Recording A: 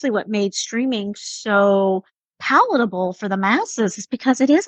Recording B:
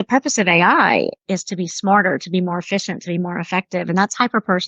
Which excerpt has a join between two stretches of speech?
B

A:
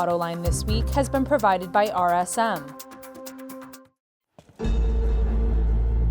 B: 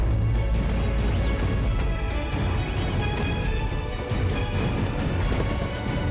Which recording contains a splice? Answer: A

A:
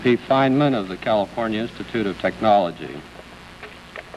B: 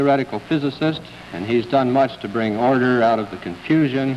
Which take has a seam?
B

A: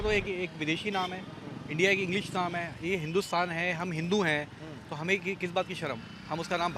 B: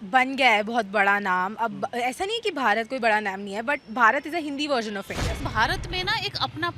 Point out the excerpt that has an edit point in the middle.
B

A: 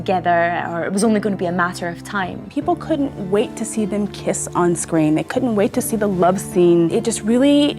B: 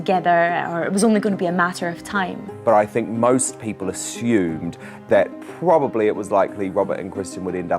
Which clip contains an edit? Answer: A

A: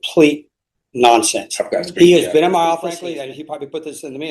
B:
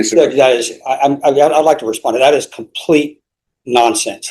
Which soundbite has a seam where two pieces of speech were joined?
A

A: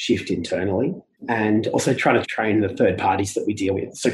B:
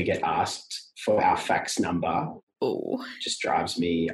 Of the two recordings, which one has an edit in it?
A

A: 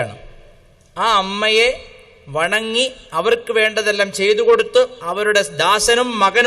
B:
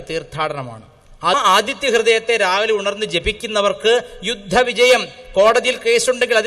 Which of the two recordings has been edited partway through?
B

